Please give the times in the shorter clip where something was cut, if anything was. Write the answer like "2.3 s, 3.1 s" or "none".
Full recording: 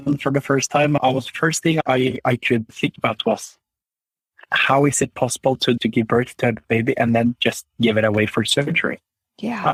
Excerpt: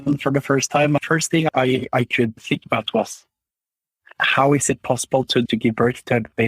1.0 s